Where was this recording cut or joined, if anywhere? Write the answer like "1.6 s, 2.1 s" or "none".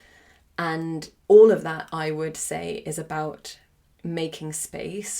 1.1 s